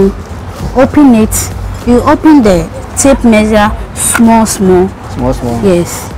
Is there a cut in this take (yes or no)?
no